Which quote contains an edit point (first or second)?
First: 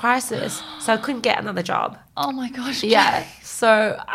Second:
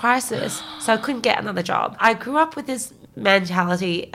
second